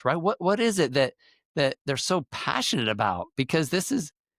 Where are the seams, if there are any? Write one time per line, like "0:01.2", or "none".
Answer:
none